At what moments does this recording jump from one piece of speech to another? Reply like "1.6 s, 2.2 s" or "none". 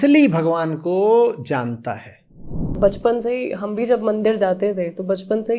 2.8 s